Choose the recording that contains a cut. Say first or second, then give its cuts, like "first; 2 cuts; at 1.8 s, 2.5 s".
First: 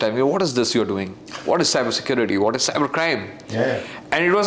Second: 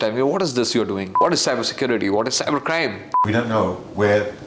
second; 2 cuts; at 1.1 s, 3.1 s